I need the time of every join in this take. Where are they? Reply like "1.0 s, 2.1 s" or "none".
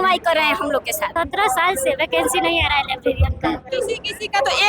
1.1 s, 3.7 s